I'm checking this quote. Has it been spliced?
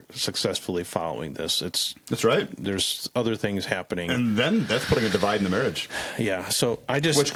no; 0 cuts

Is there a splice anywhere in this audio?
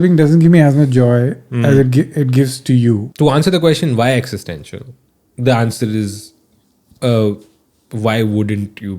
yes; 1 cut; at 3.1 s

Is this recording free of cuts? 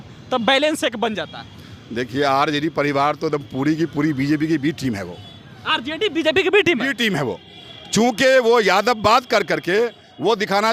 yes; 0 cuts

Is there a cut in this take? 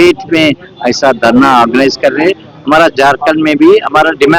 no; 0 cuts

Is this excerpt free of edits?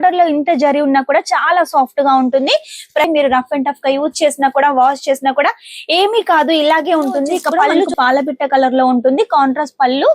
no; 2 cuts; at 3.1 s, 7.9 s

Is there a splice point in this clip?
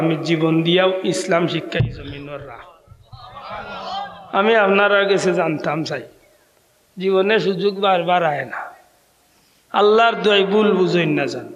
no; 0 cuts

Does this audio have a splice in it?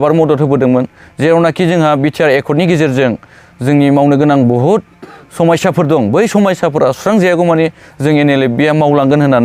no; 0 cuts

